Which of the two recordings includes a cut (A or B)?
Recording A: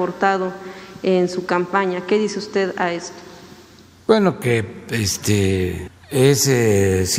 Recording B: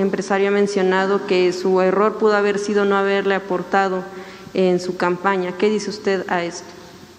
A